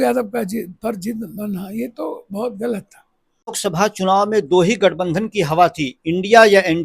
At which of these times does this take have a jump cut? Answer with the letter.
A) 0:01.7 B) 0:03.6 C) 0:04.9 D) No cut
B